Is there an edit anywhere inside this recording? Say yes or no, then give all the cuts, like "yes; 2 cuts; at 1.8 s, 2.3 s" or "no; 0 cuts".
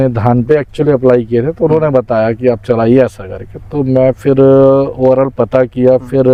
no; 0 cuts